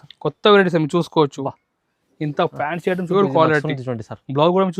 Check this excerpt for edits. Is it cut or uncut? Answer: cut